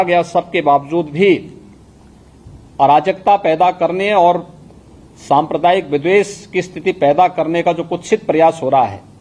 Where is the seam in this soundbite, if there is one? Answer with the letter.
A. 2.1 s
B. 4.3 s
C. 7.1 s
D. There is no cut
D